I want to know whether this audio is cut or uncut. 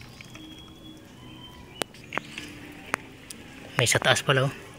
cut